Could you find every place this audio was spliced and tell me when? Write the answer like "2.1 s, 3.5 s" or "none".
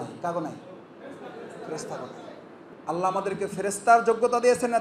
2.7 s